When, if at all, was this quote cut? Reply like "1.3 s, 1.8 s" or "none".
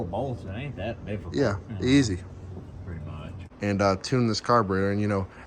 3.4 s